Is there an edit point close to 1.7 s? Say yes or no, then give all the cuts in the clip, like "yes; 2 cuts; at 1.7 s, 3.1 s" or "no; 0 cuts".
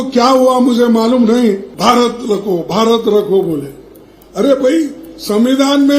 yes; 1 cut; at 1.7 s